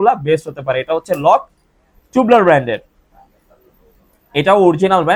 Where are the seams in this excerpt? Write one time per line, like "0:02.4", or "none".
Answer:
none